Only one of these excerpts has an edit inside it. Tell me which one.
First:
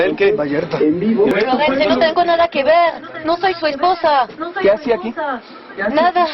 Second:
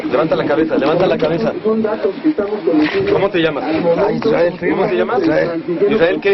first; 1 cut; at 1.3 s

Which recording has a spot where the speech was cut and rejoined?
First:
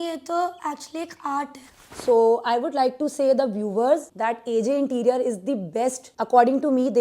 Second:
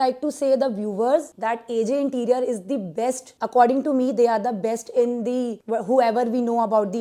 first; 1 cut; at 1.8 s

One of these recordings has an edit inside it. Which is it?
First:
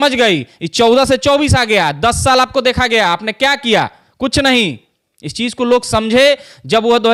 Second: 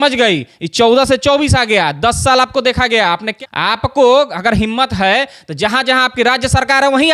second; 1 cut; at 3.3 s

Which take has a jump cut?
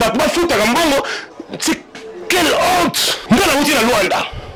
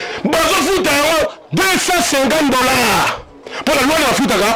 first; 1 cut; at 3.2 s

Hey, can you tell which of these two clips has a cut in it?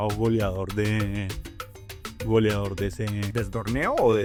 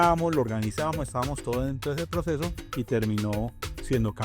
second; 1 cut; at 2.6 s

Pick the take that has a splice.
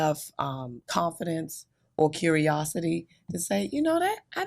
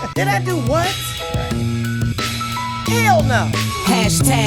second; 1 cut; at 3.5 s

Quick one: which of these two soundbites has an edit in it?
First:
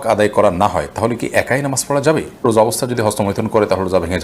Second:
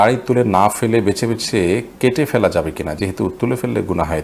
first; 1 cut; at 2.4 s

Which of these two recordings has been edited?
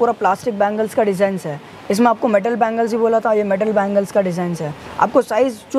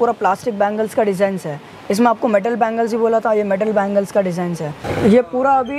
second; 1 cut; at 4.8 s

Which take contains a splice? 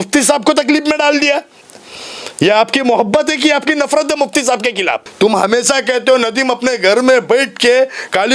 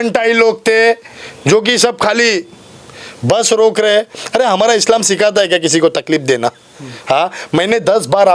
first; 1 cut; at 5.0 s

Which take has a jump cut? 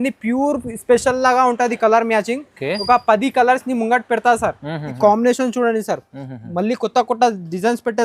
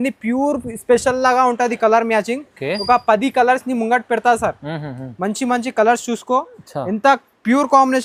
first; 1 cut; at 5.0 s

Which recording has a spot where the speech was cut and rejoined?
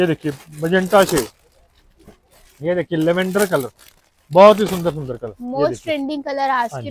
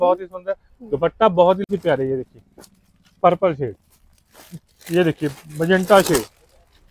second; 1 cut; at 1.7 s

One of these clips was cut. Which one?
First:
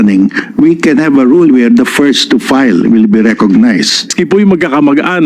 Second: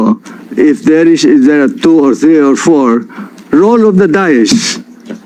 first; 1 cut; at 4.2 s

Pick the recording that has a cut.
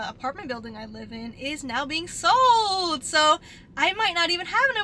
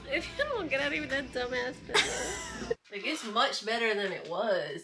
second; 1 cut; at 2.8 s

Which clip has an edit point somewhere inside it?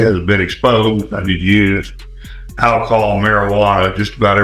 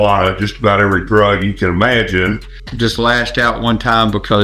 second; 1 cut; at 2.5 s

